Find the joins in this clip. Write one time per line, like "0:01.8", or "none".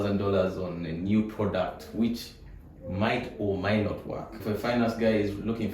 0:04.3